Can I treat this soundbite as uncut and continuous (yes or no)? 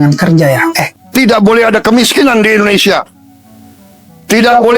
no